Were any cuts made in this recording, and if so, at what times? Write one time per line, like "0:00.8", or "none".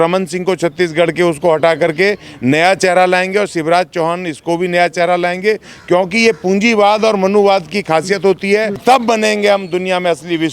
0:08.8